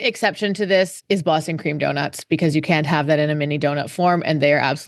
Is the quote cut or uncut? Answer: cut